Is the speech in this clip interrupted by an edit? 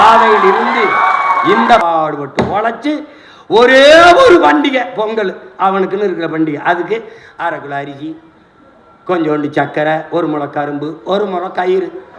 yes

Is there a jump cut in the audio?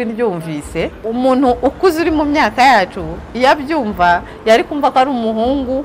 yes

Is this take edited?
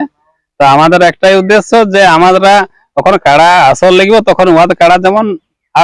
no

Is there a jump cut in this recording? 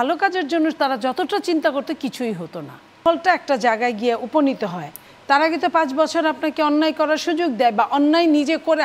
yes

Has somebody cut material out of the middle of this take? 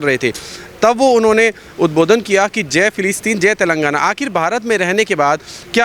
no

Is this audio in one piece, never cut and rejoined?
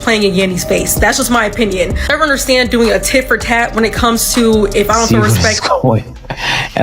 no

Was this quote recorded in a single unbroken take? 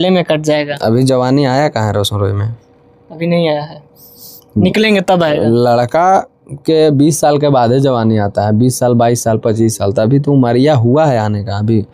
yes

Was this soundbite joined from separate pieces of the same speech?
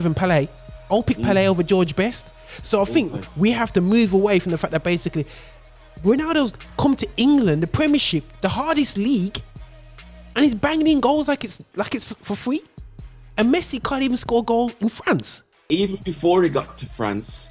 yes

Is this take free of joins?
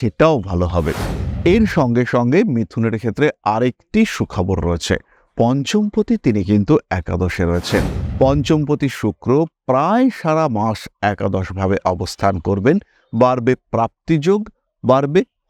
no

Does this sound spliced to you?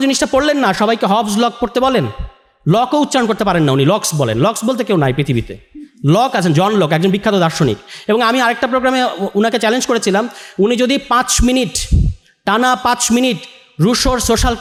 no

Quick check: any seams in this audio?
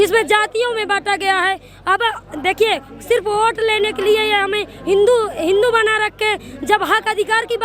no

